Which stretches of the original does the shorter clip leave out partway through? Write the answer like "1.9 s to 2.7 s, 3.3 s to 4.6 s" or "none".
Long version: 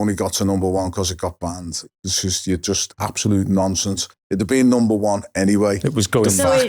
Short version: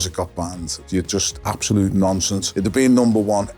1.9 s to 2.4 s, 4.0 s to 4.2 s